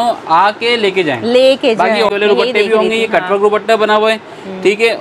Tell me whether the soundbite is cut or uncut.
cut